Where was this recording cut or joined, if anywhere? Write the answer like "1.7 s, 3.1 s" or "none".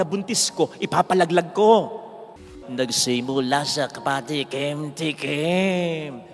2.4 s